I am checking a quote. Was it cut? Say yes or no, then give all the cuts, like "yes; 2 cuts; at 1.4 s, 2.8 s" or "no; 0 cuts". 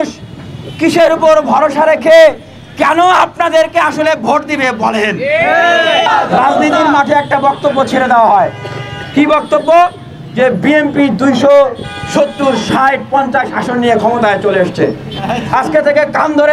yes; 1 cut; at 6.1 s